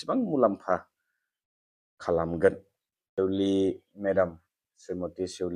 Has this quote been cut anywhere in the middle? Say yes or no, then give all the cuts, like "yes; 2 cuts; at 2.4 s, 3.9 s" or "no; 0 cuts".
yes; 1 cut; at 3.0 s